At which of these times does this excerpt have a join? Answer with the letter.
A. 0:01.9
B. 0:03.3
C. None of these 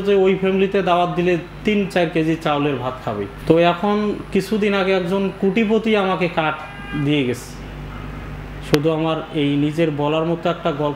B